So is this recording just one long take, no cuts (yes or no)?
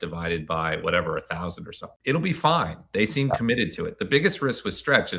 no